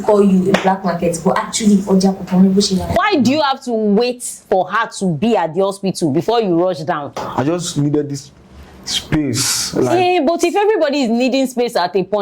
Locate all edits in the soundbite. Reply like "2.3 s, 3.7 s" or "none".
2.9 s, 7.2 s